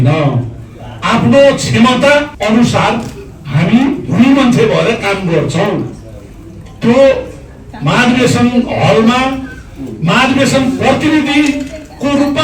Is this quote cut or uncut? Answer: cut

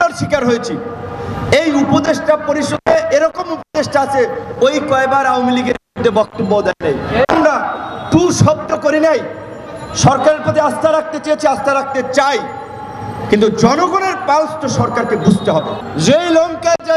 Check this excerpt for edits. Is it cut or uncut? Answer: cut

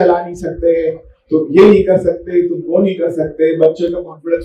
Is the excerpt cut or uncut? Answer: uncut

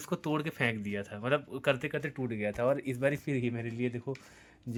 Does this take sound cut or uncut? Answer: uncut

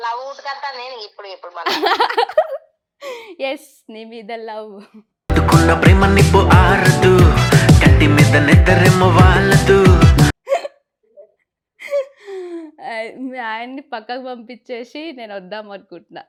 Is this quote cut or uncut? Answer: uncut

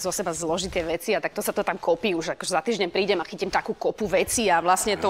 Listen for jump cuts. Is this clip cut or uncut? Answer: uncut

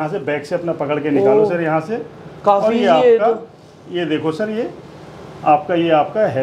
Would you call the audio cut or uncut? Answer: uncut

